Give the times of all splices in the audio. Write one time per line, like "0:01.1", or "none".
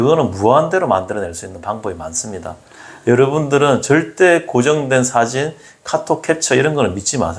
none